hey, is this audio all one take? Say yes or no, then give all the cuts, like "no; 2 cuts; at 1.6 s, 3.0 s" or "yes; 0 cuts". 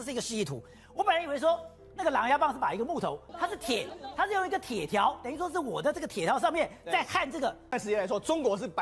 no; 2 cuts; at 3.2 s, 7.7 s